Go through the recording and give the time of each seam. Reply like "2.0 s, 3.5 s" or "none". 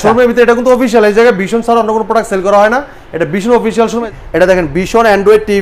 4.1 s